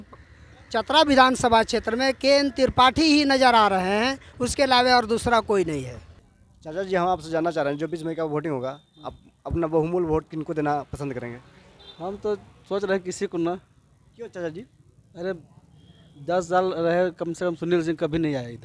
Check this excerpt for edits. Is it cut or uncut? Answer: cut